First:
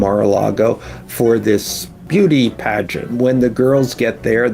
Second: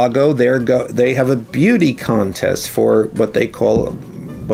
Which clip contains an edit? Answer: first; 2 cuts; at 2.0 s, 3.1 s

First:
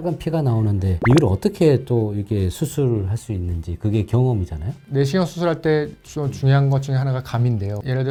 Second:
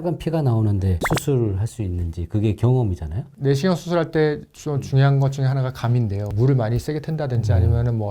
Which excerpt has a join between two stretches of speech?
second; 2 cuts; at 1.0 s, 6.3 s

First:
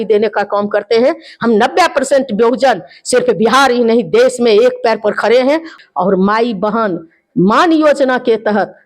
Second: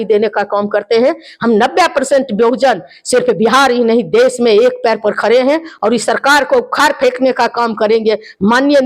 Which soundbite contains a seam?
first; 1 cut; at 5.7 s

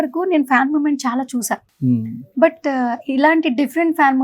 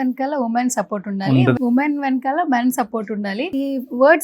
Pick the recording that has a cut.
second; 2 cuts; at 1.6 s, 3.5 s

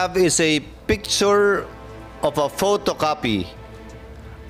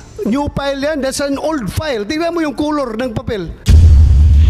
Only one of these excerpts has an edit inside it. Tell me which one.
second; 1 cut; at 3.5 s

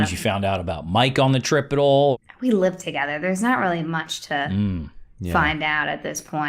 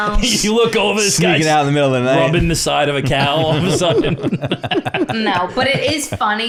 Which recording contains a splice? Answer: first; 1 cut; at 2.1 s

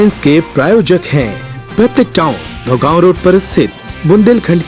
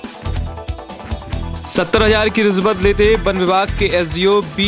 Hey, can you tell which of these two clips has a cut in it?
second; 1 cut; at 1.5 s

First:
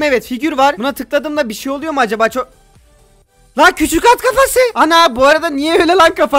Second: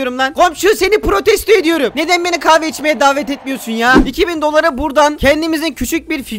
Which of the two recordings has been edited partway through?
second; 1 cut; at 4.0 s

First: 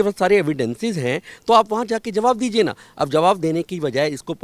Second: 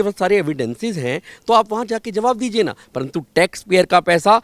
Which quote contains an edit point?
second; 1 cut; at 2.8 s

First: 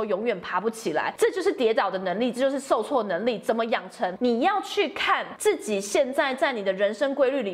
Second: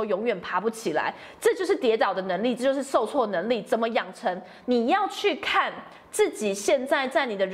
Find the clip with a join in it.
first; 3 cuts; at 1.1 s, 4.1 s, 5.3 s

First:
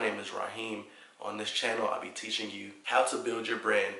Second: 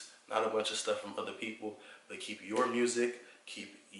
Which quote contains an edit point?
first; 1 cut; at 2.7 s

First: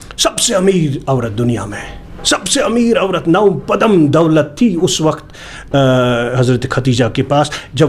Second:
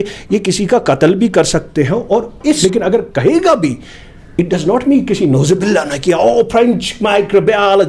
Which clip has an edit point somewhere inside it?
second; 1 cut; at 2.6 s

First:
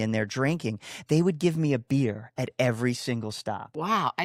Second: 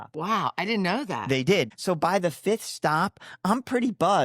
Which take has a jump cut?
second; 1 cut; at 1.7 s

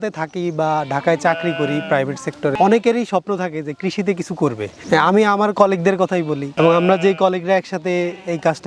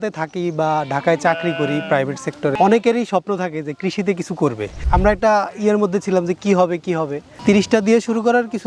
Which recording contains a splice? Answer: second; 1 cut; at 4.8 s

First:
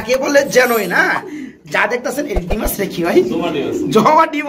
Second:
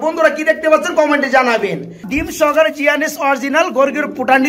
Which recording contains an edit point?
second; 1 cut; at 2.1 s

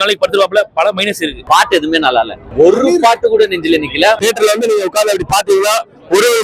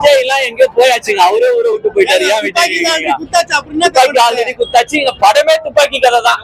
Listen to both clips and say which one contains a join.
first; 3 cuts; at 1.3 s, 2.4 s, 4.2 s

